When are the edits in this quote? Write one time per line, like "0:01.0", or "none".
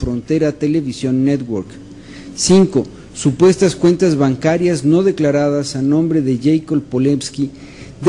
none